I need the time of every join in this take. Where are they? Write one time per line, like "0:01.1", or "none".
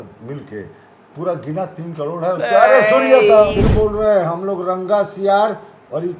0:03.6